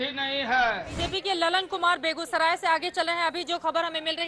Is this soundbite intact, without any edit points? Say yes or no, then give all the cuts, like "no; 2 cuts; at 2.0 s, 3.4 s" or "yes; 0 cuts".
no; 1 cut; at 0.9 s